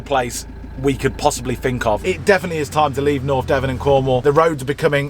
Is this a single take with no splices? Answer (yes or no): no